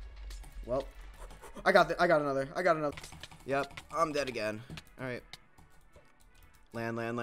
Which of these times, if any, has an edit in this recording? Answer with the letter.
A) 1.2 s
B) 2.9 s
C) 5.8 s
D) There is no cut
B